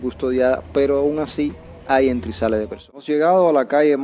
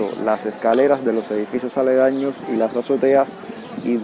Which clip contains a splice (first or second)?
first